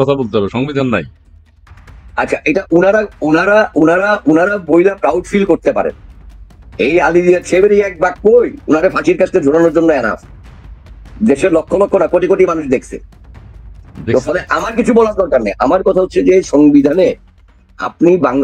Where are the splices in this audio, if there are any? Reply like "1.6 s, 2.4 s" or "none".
none